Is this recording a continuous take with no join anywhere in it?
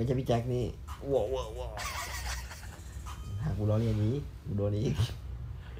yes; 0 cuts

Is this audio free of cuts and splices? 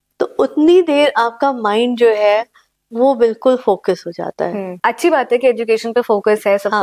no; 1 cut; at 4.7 s

